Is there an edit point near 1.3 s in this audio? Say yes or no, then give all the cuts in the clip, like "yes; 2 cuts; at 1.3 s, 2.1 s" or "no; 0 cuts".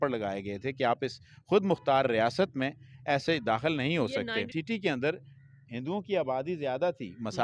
no; 1 cut; at 4.5 s